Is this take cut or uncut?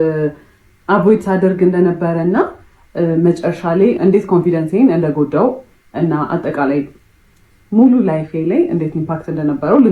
uncut